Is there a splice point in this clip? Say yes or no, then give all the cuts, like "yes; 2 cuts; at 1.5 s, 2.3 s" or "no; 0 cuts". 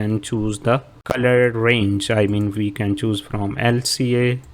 yes; 1 cut; at 0.9 s